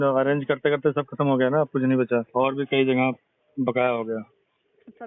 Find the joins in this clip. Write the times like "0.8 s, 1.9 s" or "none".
2.3 s